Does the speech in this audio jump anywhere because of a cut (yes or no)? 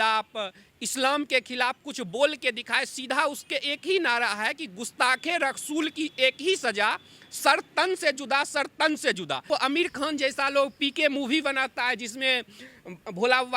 yes